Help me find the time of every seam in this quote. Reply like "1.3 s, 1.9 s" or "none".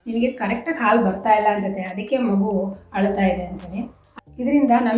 4.0 s